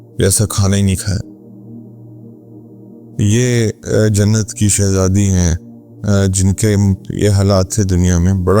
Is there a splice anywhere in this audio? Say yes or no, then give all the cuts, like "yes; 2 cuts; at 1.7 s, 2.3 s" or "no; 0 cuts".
yes; 2 cuts; at 1.8 s, 3.2 s